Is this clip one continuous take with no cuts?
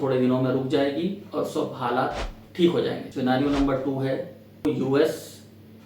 no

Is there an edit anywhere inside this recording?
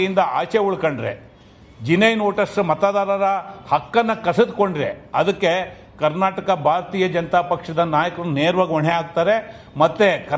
no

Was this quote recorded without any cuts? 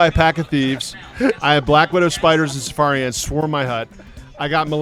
yes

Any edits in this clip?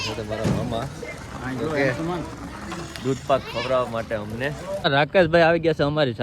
yes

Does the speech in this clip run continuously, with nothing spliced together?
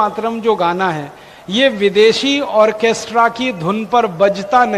yes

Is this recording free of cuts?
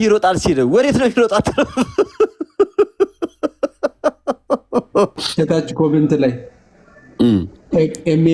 no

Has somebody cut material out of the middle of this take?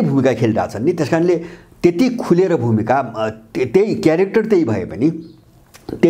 no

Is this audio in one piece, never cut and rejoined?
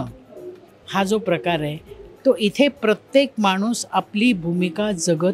yes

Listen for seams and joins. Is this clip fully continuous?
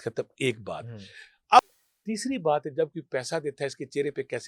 no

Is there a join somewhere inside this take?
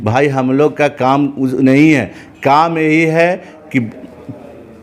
no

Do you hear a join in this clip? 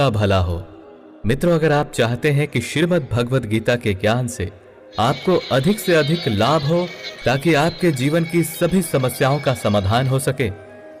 no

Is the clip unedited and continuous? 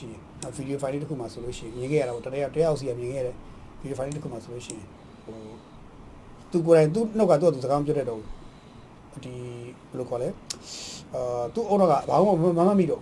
yes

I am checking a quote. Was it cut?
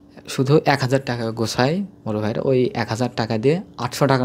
no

